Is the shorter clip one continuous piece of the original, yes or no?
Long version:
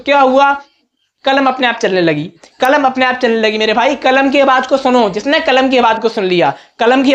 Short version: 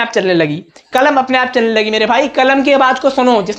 yes